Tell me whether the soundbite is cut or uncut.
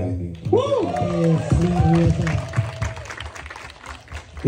uncut